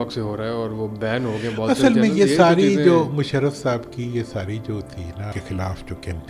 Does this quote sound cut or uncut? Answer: cut